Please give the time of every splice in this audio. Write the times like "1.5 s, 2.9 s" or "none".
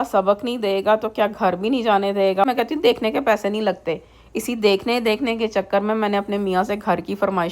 2.4 s